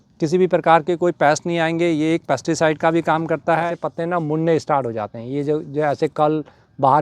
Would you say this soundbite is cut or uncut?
cut